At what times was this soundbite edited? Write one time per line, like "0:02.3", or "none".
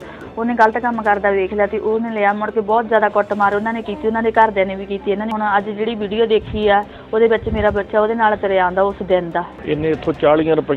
0:05.3
0:09.5